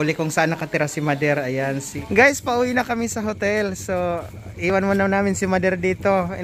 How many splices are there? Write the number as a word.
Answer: one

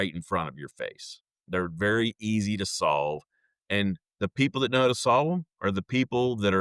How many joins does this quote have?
zero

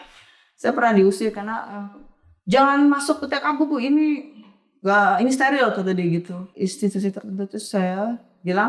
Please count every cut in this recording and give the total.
one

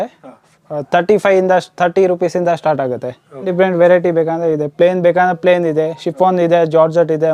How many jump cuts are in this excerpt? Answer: one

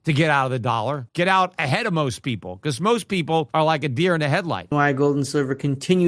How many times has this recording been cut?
three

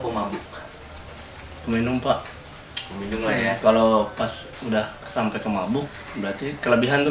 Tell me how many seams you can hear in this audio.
zero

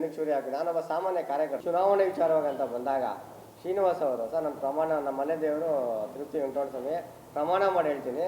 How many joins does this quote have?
one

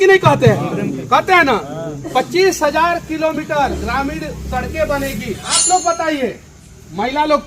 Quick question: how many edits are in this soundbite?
one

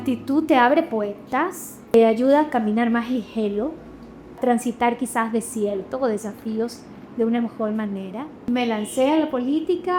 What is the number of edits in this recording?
three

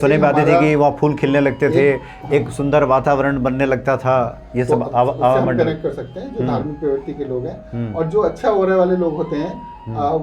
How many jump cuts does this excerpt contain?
zero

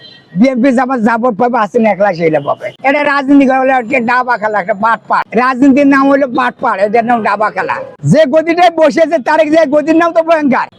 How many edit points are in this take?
two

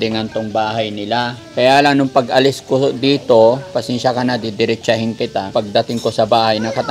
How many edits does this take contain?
two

